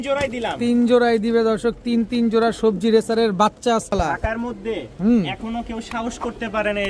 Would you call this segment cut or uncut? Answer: cut